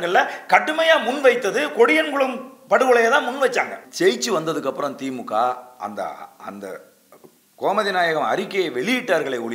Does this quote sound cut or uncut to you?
cut